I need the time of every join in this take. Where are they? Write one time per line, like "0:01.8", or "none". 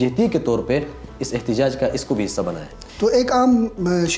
0:02.8